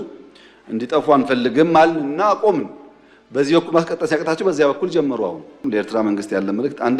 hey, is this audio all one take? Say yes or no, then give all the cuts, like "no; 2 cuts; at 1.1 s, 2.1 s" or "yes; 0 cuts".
no; 1 cut; at 5.6 s